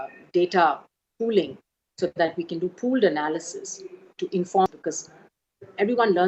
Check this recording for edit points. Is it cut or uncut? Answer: cut